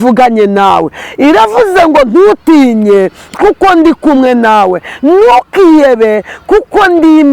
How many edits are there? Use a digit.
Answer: 0